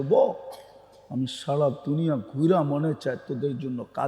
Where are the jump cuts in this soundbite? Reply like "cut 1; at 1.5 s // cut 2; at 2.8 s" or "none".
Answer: none

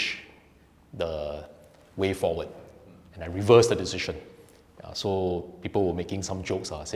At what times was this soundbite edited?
none

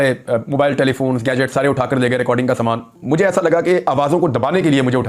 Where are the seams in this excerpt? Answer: cut 1; at 3.0 s

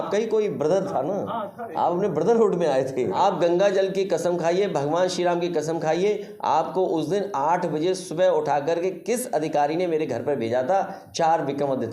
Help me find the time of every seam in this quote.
cut 1; at 3.1 s

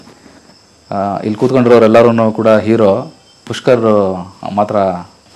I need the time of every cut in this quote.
none

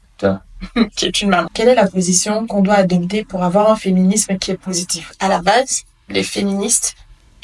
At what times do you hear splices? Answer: cut 1; at 1.5 s // cut 2; at 5.2 s

